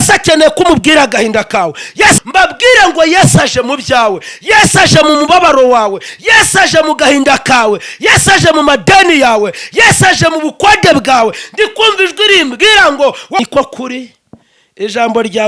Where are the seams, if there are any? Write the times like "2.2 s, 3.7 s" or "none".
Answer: 2.2 s, 13.4 s